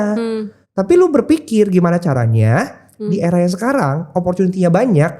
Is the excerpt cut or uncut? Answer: uncut